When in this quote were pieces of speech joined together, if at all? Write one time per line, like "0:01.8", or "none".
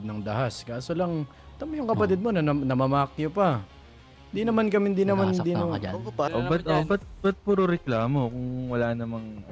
0:06.3